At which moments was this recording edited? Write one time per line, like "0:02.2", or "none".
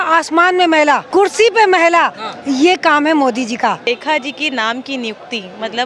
0:01.0
0:03.8